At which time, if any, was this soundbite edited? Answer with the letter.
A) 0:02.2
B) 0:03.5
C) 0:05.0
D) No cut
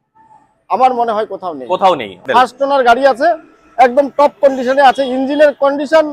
A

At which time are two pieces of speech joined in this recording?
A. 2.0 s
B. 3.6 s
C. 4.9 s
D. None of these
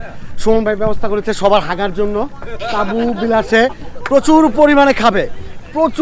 D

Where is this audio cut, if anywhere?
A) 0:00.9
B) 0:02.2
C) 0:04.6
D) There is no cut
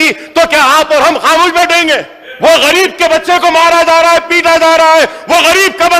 B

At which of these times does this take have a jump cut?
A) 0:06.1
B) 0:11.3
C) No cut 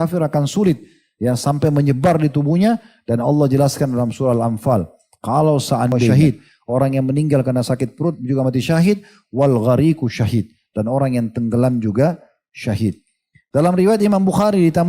A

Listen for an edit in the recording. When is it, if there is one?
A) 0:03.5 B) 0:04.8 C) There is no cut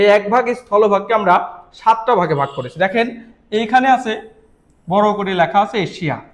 C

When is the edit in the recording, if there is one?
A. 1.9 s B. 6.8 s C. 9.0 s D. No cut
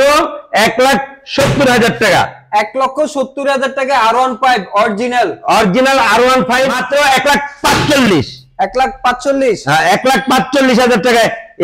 B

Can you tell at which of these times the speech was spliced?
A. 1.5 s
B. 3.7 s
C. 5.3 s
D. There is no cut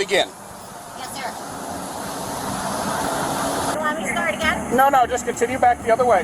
B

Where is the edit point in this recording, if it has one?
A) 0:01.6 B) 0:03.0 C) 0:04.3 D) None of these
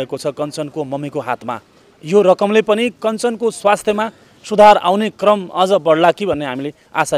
D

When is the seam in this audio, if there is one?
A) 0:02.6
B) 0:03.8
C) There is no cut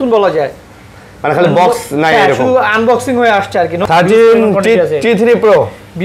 B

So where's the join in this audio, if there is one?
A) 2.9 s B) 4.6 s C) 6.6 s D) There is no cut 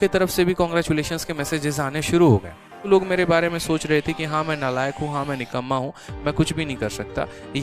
A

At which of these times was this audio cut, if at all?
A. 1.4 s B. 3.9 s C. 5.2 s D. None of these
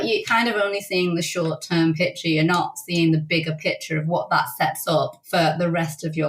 C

